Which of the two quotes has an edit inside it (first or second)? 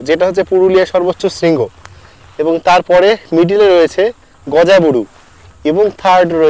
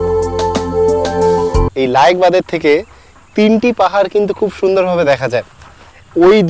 second